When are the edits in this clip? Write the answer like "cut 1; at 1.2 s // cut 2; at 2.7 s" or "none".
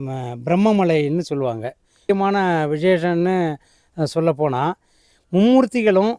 cut 1; at 2.0 s